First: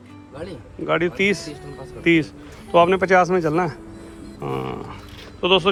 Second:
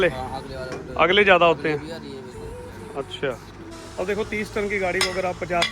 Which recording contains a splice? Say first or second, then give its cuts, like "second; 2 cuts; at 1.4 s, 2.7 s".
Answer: second; 1 cut; at 3.8 s